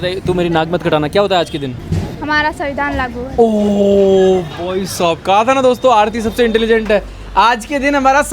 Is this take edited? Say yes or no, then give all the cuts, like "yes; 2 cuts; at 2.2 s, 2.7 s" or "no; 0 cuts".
no; 0 cuts